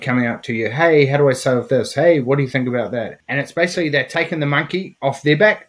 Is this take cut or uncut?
cut